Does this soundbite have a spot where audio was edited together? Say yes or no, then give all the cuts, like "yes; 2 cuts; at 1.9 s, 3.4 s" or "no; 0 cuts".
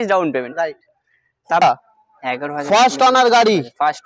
yes; 1 cut; at 1.6 s